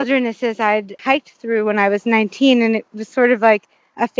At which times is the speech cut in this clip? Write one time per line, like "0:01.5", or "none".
0:00.9